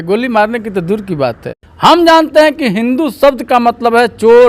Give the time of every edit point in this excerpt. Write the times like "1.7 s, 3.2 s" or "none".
1.5 s